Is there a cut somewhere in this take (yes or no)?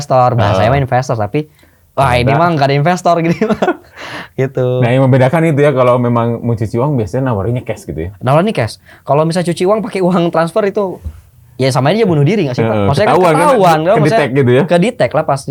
no